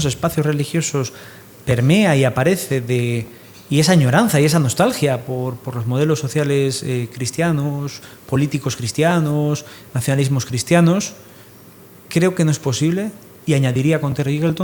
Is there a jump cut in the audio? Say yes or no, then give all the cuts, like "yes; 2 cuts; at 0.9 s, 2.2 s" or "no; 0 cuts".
no; 0 cuts